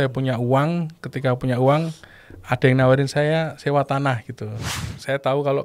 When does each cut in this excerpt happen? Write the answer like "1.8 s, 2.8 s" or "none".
4.7 s